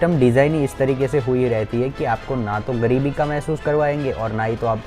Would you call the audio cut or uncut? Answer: uncut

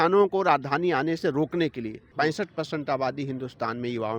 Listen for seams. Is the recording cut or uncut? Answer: cut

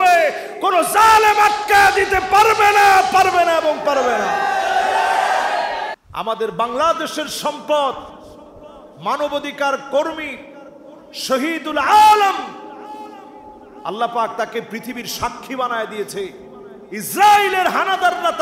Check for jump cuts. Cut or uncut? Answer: cut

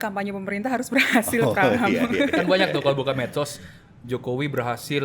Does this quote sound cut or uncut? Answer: uncut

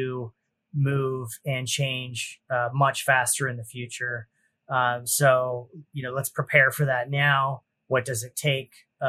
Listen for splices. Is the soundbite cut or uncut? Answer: uncut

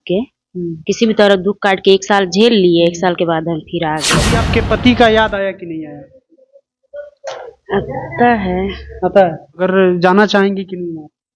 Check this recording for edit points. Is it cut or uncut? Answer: cut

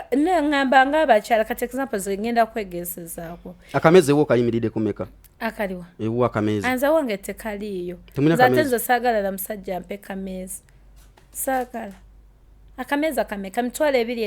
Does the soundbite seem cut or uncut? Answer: uncut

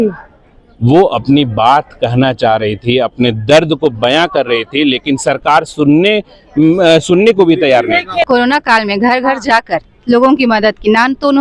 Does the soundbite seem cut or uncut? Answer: cut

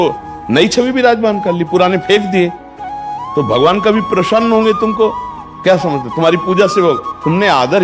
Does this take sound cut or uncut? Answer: uncut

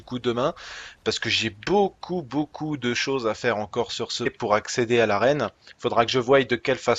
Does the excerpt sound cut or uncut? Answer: uncut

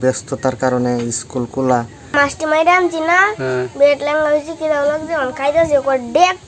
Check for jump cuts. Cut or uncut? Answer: cut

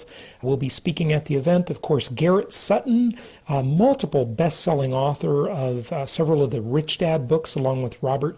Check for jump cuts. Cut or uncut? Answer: uncut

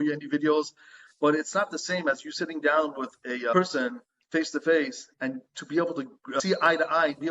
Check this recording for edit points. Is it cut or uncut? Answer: cut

